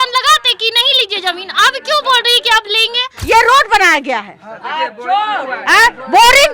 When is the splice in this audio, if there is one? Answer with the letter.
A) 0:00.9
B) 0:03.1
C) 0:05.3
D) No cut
B